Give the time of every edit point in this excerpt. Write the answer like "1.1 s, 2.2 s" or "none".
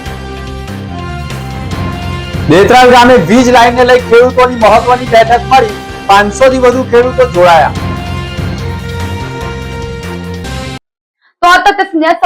none